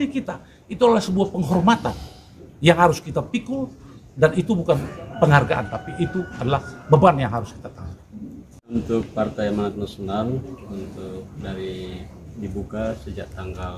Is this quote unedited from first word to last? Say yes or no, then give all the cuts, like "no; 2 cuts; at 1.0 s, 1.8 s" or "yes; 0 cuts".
no; 1 cut; at 8.8 s